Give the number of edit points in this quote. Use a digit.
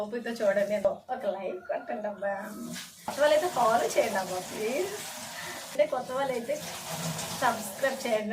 3